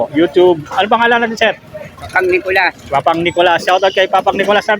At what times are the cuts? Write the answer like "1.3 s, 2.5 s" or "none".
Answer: 2.0 s